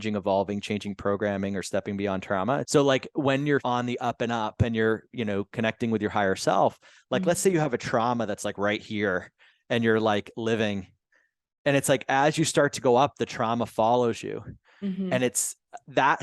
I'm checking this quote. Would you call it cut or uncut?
cut